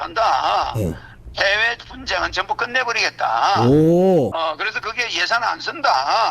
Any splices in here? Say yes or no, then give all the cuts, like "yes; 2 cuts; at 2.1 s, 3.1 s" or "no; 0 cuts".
yes; 1 cut; at 4.3 s